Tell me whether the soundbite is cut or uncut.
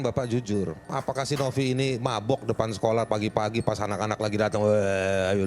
cut